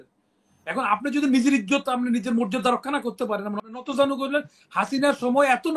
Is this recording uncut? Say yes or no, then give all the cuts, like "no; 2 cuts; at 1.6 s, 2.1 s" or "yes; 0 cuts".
no; 1 cut; at 3.7 s